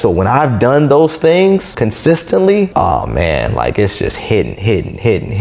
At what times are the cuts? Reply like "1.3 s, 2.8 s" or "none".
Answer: 1.7 s, 2.7 s